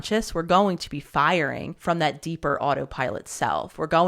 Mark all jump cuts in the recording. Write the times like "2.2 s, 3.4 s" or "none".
1.7 s

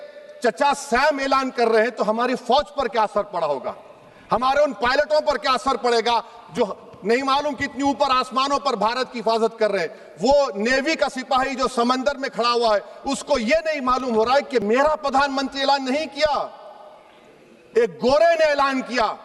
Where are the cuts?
none

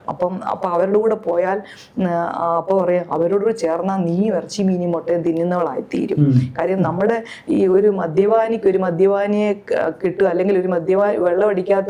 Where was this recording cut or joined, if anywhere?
none

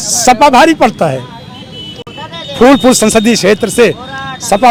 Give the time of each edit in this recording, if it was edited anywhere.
none

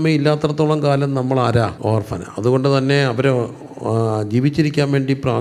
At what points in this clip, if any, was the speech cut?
1.8 s

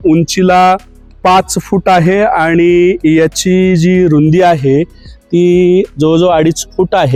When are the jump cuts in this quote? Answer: none

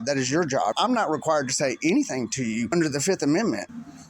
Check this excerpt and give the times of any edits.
0.8 s, 2.7 s

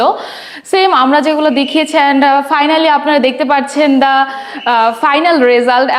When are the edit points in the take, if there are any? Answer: none

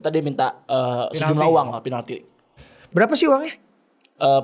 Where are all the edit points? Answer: 2.5 s

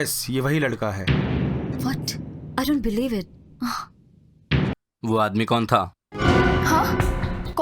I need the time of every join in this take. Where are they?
4.7 s

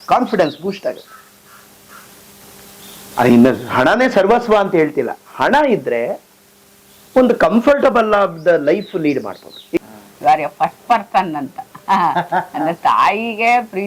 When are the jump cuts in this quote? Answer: 9.8 s

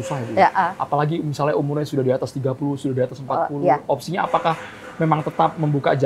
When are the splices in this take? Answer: none

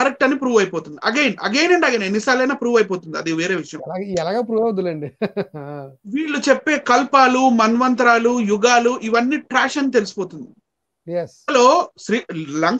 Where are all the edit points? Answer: 11.5 s

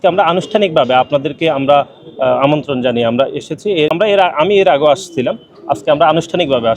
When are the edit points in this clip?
3.9 s

